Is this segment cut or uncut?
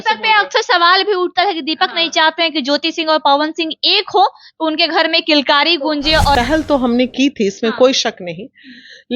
cut